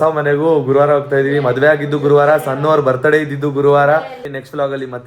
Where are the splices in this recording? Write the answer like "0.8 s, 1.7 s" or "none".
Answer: none